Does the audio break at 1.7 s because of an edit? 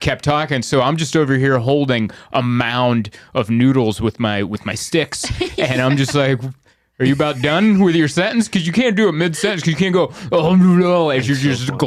no; 0 cuts

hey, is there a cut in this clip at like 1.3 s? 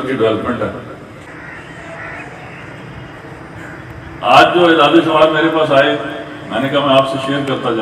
yes; 1 cut; at 1.3 s

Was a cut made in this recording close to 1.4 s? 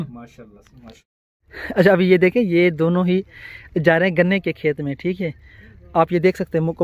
yes; 1 cut; at 1.4 s

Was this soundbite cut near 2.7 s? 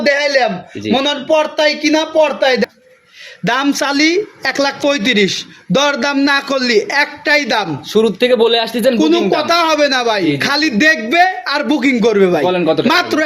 yes; 1 cut; at 2.7 s

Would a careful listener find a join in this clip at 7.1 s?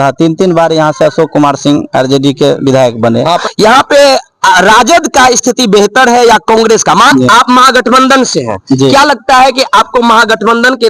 yes; 2 cuts; at 3.4 s, 7.1 s

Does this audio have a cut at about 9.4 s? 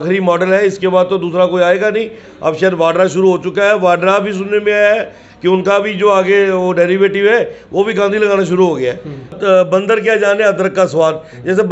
yes; 1 cut; at 9.4 s

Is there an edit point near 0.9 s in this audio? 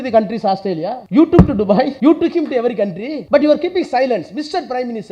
yes; 3 cuts; at 0.9 s, 1.9 s, 3.1 s

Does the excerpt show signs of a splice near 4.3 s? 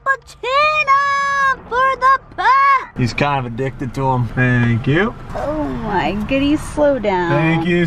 yes; 3 cuts; at 2.9 s, 4.3 s, 5.2 s

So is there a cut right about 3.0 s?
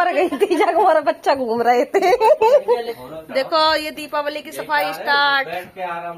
yes; 1 cut; at 3.0 s

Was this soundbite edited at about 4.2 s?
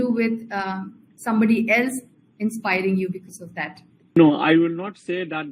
yes; 1 cut; at 4.2 s

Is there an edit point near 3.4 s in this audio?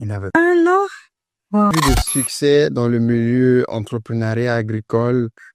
no; 1 cut; at 1.7 s

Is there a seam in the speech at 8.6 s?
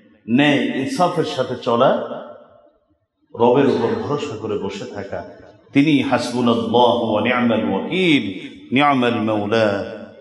no; 0 cuts

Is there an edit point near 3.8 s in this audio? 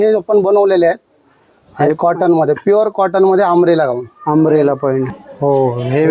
no; 1 cut; at 5.1 s

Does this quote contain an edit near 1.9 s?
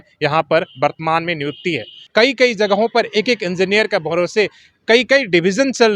yes; 1 cut; at 1.9 s

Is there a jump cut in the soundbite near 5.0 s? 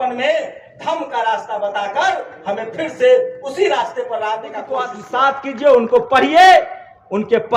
yes; 1 cut; at 5.0 s

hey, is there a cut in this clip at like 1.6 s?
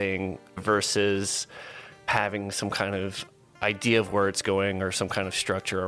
no; 0 cuts

